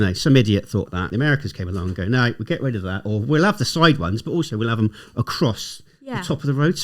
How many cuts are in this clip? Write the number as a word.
one